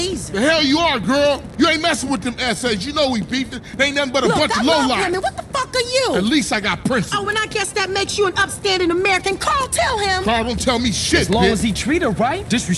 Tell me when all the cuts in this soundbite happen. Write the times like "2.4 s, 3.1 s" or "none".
none